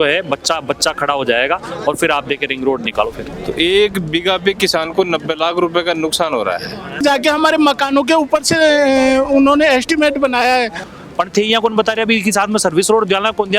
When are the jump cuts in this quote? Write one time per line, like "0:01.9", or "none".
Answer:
0:03.3
0:07.0
0:10.9